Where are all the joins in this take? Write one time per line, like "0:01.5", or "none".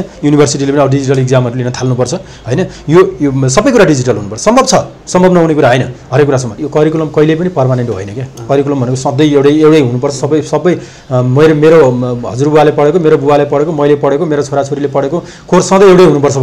0:06.6